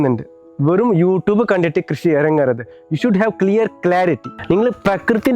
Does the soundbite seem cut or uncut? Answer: cut